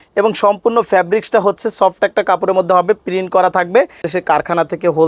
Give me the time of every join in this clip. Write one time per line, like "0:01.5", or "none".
0:04.0